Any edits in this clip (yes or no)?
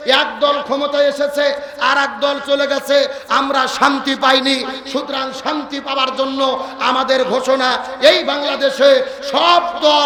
no